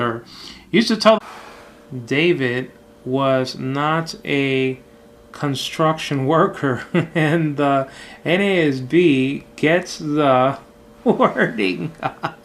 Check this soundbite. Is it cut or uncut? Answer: uncut